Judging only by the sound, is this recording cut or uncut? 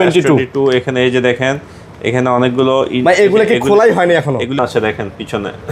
cut